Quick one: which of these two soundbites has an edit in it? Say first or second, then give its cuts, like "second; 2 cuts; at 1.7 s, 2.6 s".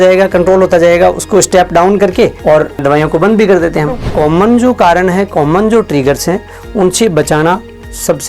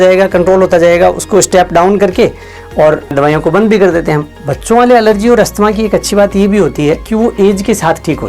first; 2 cuts; at 2.4 s, 4.0 s